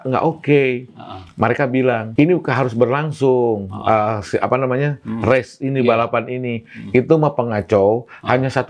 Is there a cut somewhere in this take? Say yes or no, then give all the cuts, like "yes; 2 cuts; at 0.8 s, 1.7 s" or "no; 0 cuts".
yes; 1 cut; at 2.1 s